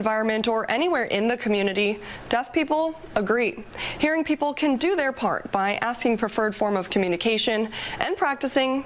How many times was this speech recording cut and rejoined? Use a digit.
0